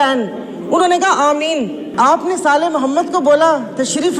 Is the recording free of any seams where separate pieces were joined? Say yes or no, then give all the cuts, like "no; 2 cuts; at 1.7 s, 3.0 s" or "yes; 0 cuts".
no; 1 cut; at 1.8 s